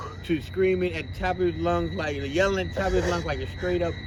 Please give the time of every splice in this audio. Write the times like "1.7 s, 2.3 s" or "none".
none